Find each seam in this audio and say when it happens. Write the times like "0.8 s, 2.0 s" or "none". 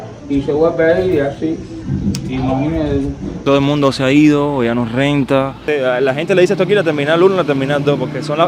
3.3 s, 5.6 s